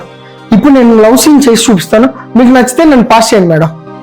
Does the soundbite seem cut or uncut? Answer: uncut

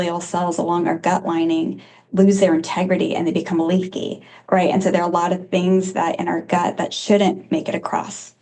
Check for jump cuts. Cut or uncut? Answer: cut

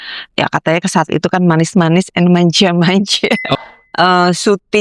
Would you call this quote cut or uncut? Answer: cut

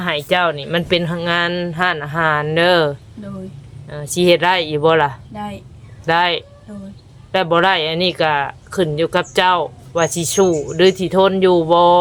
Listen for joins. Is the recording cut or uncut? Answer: uncut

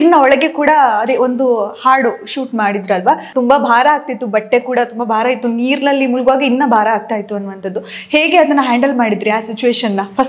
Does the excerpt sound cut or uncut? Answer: cut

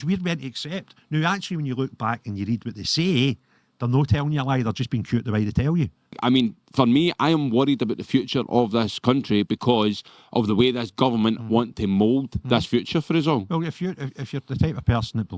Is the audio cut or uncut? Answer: cut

